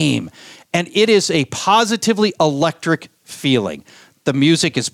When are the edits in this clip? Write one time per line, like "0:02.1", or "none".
none